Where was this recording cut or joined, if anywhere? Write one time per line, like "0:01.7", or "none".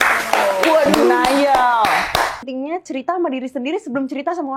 0:02.4